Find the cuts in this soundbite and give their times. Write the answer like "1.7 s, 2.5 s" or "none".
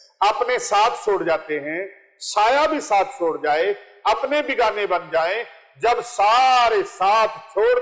none